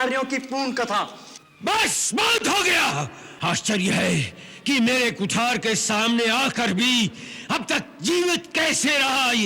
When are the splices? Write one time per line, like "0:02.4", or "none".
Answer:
0:03.2

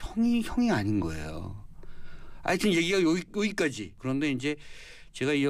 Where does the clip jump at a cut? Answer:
0:03.8

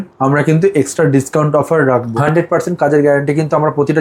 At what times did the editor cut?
0:02.1

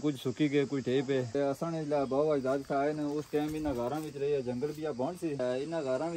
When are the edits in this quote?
0:01.3
0:05.4

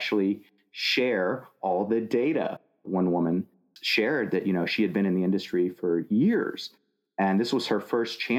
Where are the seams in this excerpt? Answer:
0:02.7

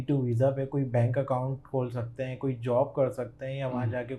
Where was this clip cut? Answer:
none

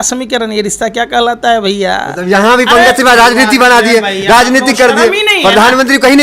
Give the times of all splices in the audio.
none

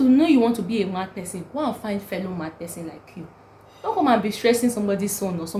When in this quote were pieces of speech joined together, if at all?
none

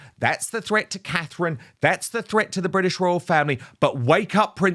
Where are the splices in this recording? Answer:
none

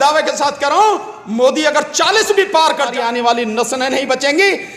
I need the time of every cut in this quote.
0:02.9

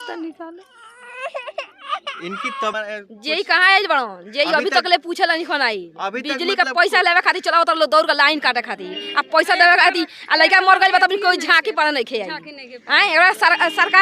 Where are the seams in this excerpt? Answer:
0:02.8

